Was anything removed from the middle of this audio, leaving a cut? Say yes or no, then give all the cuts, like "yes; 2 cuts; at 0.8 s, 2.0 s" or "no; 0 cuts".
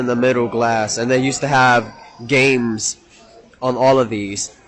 no; 0 cuts